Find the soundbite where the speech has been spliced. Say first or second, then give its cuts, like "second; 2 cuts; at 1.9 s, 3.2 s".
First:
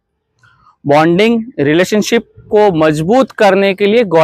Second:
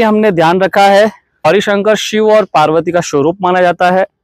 second; 1 cut; at 1.5 s